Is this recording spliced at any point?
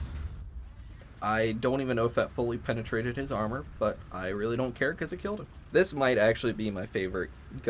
yes; 2 cuts; at 1.2 s, 5.5 s

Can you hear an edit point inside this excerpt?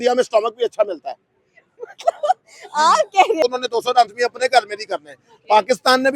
yes; 1 cut; at 3.4 s

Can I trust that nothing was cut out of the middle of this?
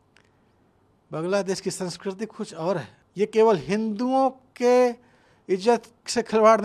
no; 1 cut; at 3.0 s

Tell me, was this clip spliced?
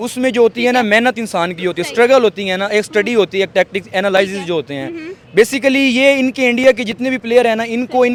no; 0 cuts

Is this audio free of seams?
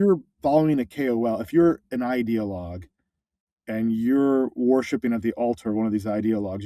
yes; 0 cuts

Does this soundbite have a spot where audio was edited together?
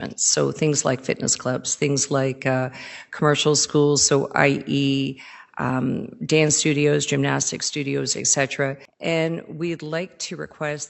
yes; 1 cut; at 8.9 s

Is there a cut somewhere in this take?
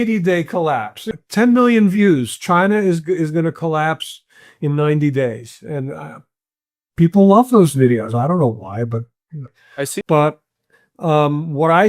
yes; 2 cuts; at 1.0 s, 10.0 s

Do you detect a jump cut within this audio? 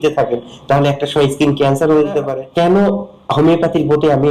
yes; 1 cut; at 2.4 s

